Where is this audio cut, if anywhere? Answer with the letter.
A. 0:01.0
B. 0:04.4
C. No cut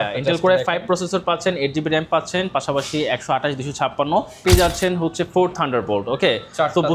B